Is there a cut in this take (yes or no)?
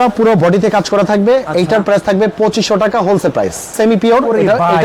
yes